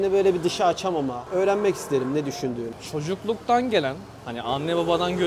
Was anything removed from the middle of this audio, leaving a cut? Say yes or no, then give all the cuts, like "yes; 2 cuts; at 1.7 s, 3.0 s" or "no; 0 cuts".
no; 0 cuts